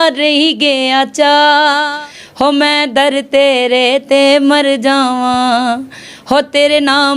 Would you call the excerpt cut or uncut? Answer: cut